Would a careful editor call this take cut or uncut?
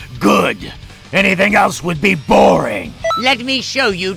cut